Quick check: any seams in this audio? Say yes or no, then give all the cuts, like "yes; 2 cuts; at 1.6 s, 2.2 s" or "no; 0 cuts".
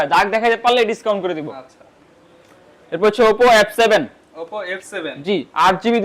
no; 0 cuts